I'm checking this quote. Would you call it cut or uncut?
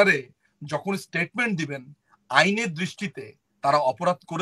uncut